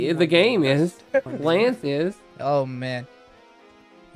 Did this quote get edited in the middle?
yes; 2 cuts; at 1.3 s, 2.3 s

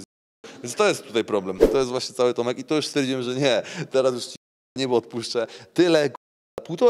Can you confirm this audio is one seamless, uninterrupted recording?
no; 1 cut; at 1.6 s

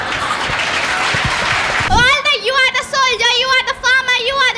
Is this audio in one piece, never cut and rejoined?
no; 1 cut; at 1.8 s

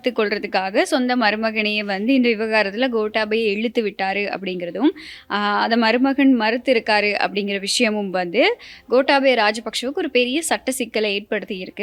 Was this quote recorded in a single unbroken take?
yes; 0 cuts

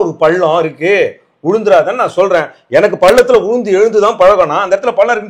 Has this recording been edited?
no; 0 cuts

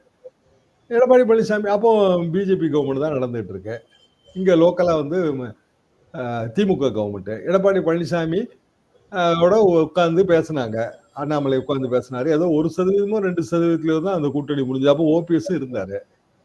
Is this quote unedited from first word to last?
yes; 0 cuts

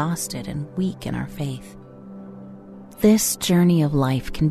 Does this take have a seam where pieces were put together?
yes; 2 cuts; at 1.6 s, 3.0 s

